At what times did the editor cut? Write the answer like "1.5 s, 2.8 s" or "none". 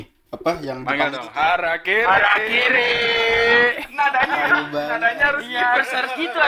none